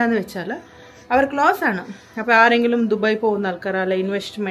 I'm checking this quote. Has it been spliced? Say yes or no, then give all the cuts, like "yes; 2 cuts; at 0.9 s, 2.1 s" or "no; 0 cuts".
no; 0 cuts